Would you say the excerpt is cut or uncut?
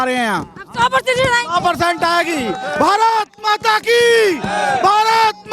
uncut